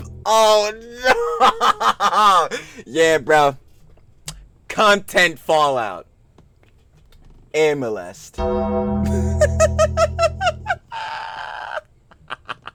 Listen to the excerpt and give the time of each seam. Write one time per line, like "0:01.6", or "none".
none